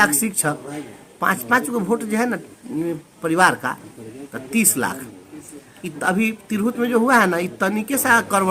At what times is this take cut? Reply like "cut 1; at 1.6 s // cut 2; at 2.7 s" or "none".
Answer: none